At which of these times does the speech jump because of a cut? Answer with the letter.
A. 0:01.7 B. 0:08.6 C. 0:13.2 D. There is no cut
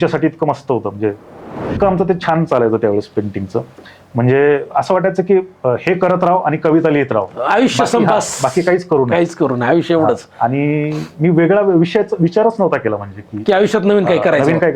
A